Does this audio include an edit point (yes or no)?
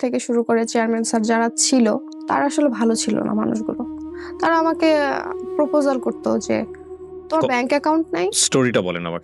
yes